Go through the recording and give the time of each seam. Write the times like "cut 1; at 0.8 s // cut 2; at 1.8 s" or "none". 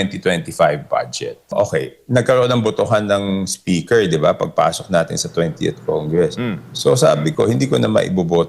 cut 1; at 1.5 s